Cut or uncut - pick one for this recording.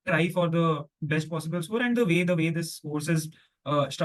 uncut